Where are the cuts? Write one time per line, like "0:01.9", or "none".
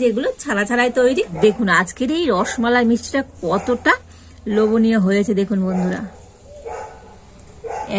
0:01.3